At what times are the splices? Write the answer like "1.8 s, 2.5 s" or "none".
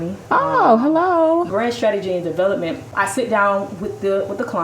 1.5 s, 2.8 s